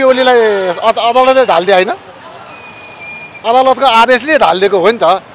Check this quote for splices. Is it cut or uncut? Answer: uncut